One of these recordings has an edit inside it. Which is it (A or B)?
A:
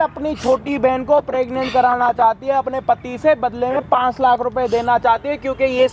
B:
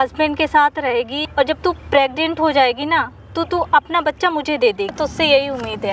B